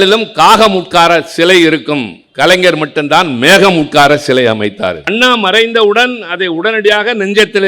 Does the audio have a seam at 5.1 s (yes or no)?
yes